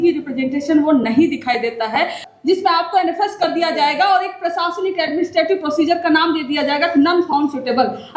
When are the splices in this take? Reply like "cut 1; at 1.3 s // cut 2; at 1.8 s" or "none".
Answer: cut 1; at 2.2 s